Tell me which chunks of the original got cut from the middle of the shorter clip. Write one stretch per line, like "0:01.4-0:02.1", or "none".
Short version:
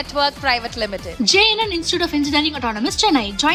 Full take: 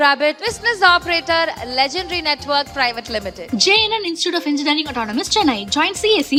none